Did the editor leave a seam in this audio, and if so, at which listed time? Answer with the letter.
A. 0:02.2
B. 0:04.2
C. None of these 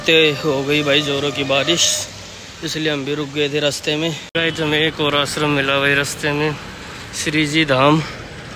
B